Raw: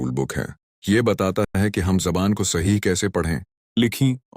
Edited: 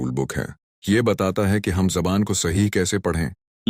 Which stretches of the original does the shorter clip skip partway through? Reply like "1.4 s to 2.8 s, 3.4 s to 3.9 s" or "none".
1.5 s to 1.6 s